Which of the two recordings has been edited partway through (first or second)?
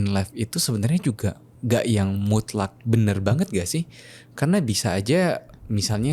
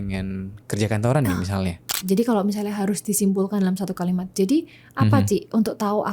second